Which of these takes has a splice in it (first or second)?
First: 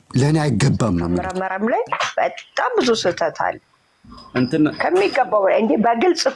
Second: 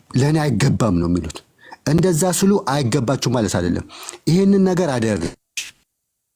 first